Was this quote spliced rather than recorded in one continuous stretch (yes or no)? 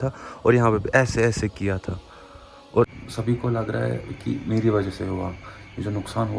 yes